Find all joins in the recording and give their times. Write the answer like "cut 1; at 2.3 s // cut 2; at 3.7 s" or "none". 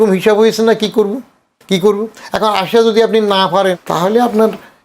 cut 1; at 3.8 s